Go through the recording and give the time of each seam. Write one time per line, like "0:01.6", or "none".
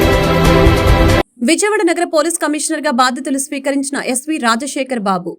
none